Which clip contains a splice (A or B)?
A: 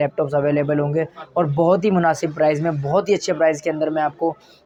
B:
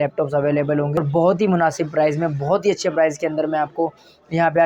B